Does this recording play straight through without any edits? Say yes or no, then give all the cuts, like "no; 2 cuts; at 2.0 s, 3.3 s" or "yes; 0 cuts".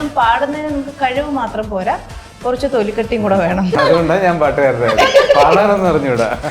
no; 1 cut; at 3.8 s